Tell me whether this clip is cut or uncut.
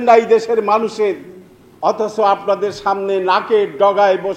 uncut